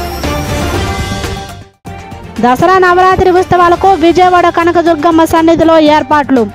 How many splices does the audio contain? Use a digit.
1